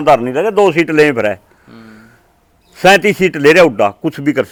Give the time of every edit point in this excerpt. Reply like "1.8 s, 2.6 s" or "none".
none